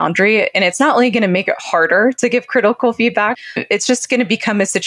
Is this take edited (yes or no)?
yes